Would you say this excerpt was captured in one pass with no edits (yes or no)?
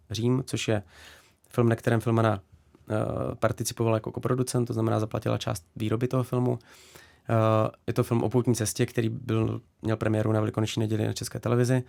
yes